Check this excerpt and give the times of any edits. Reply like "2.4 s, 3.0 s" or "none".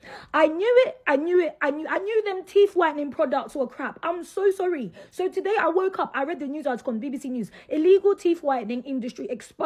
none